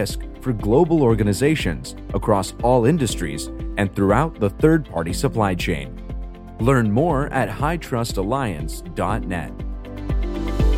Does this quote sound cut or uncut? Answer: cut